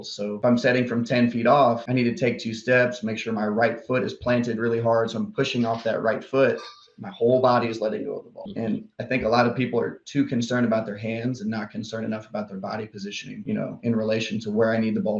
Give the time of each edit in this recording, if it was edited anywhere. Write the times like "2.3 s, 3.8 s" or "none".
none